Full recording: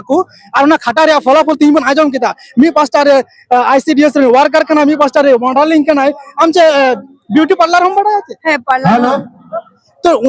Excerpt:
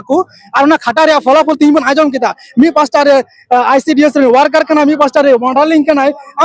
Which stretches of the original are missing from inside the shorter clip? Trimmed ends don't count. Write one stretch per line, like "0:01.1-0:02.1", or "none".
none